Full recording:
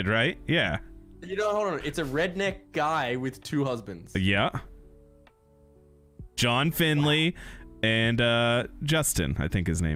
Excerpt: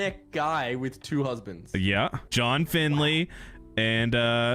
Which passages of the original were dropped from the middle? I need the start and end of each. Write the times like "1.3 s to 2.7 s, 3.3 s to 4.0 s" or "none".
4.6 s to 6.3 s